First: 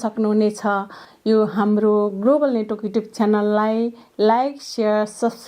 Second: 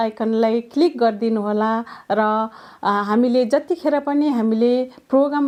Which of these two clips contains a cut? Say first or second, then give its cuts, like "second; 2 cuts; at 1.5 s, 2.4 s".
first; 1 cut; at 1.0 s